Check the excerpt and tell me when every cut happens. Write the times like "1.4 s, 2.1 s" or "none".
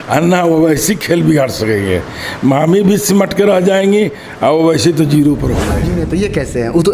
5.9 s